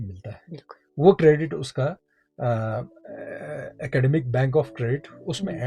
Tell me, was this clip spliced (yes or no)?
no